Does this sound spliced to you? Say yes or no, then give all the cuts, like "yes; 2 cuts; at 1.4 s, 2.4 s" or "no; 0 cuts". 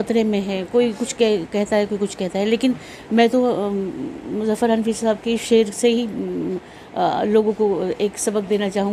no; 0 cuts